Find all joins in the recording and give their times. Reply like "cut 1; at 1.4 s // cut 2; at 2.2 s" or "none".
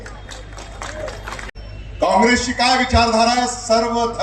cut 1; at 1.5 s